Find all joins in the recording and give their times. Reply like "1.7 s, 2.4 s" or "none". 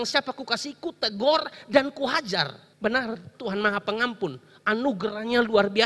2.6 s